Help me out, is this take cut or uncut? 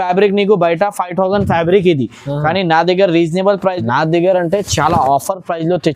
cut